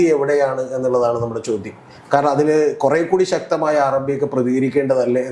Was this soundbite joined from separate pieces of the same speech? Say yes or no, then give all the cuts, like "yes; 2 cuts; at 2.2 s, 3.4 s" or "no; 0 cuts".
no; 0 cuts